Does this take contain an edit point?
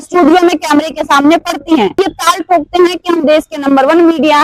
yes; 1 cut; at 2.0 s

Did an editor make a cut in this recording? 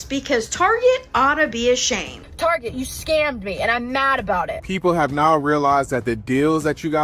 yes; 2 cuts; at 2.2 s, 4.6 s

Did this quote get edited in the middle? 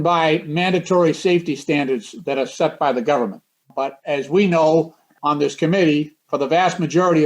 yes; 2 cuts; at 4.0 s, 5.1 s

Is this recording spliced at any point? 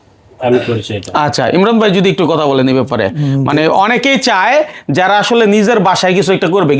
no; 0 cuts

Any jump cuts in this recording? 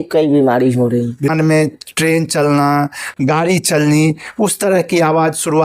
yes; 1 cut; at 1.3 s

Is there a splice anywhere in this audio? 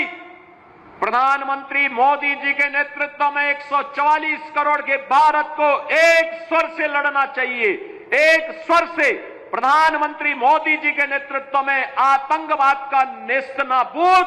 no; 0 cuts

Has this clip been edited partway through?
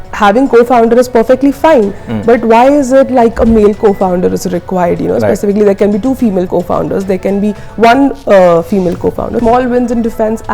yes; 2 cuts; at 6.5 s, 9.4 s

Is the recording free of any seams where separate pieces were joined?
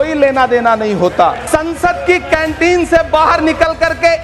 no; 1 cut; at 1.4 s

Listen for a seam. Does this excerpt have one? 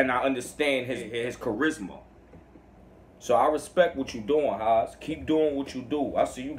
yes; 1 cut; at 1.1 s

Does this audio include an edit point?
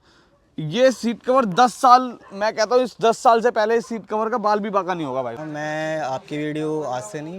yes; 1 cut; at 5.4 s

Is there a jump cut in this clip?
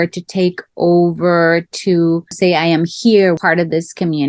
yes; 2 cuts; at 2.3 s, 3.4 s

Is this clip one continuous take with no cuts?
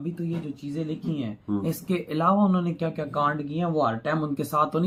yes; 0 cuts

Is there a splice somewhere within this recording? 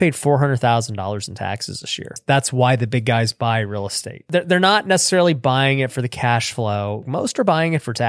yes; 3 cuts; at 2.2 s, 4.3 s, 7.1 s

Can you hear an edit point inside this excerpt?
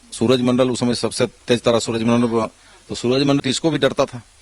yes; 1 cut; at 3.4 s

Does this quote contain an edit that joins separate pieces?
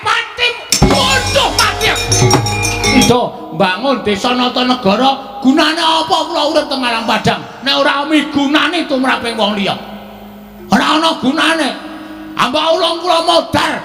yes; 1 cut; at 2.9 s

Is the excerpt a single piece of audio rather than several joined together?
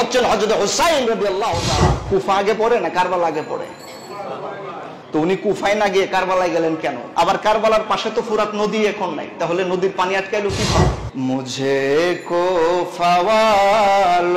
no; 3 cuts; at 2.0 s, 7.0 s, 11.0 s

